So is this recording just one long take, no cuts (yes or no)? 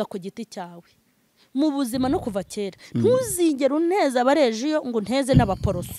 yes